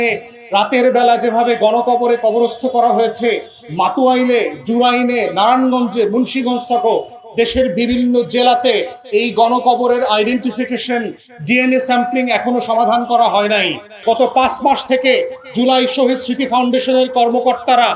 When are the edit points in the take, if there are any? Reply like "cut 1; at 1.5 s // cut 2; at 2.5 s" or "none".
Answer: cut 1; at 13.9 s